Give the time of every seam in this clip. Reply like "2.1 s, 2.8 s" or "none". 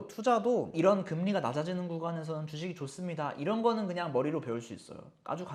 none